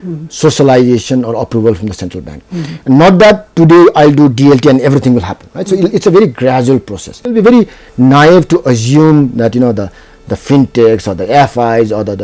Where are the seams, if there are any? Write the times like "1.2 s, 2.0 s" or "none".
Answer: 7.3 s